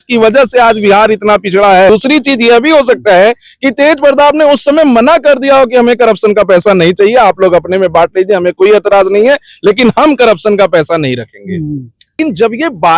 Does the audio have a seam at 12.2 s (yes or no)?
yes